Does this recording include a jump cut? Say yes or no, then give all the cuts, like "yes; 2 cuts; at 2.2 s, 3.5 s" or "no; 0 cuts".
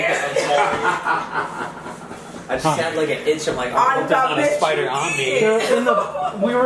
no; 0 cuts